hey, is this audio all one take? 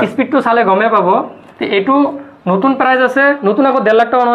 yes; 0 cuts

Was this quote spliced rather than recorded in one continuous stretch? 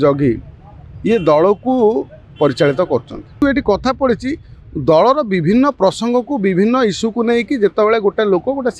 yes; 1 cut; at 3.4 s

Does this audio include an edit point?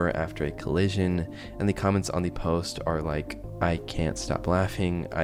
no; 0 cuts

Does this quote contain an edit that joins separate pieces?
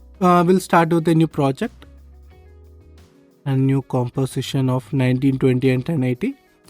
yes; 2 cuts; at 1.8 s, 3.4 s

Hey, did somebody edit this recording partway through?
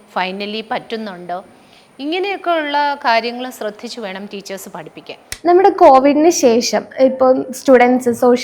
yes; 1 cut; at 5.2 s

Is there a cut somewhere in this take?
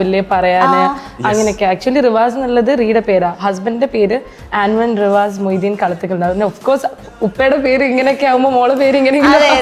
no; 0 cuts

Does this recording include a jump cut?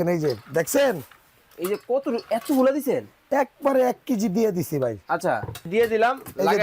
yes; 1 cut; at 5.7 s

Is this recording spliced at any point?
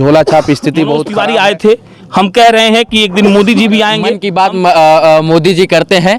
yes; 2 cuts; at 1.1 s, 4.2 s

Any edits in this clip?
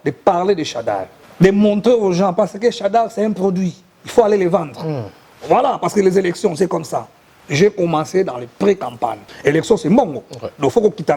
yes; 2 cuts; at 1.2 s, 9.3 s

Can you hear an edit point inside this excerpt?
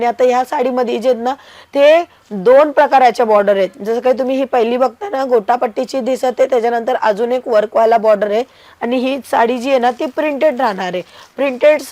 no; 0 cuts

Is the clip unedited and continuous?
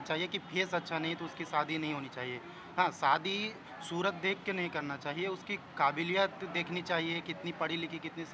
yes; 0 cuts

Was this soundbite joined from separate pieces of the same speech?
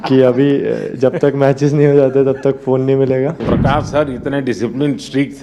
yes; 1 cut; at 3.5 s

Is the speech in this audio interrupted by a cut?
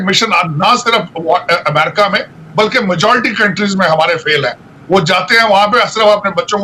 no; 0 cuts

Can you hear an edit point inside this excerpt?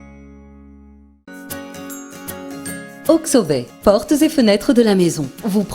yes; 1 cut; at 1.0 s

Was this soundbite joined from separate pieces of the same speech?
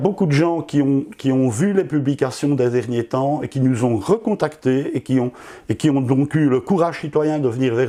no; 0 cuts

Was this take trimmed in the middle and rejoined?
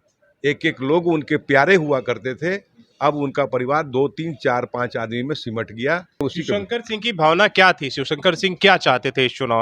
yes; 1 cut; at 6.2 s

